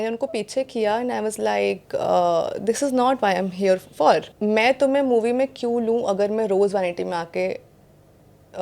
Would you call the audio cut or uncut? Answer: cut